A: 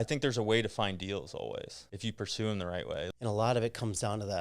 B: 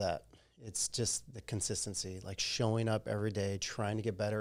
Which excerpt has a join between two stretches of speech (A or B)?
A